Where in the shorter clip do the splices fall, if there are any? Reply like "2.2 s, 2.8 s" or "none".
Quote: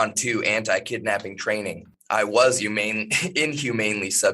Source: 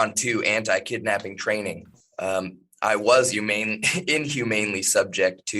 1.9 s